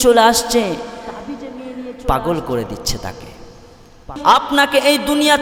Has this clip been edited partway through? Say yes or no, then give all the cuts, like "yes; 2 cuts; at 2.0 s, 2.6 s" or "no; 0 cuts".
no; 0 cuts